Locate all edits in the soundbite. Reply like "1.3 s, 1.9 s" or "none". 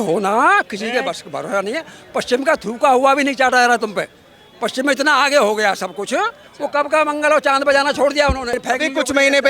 8.6 s